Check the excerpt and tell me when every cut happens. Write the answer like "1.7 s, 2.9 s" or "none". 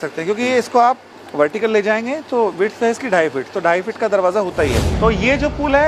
1.2 s, 4.9 s